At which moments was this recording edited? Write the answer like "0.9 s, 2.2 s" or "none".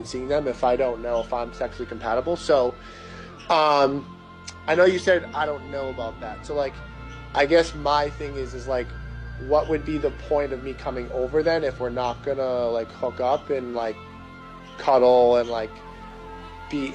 2.6 s, 7.9 s, 11.3 s, 15.5 s